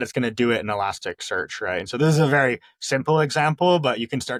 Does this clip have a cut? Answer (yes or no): no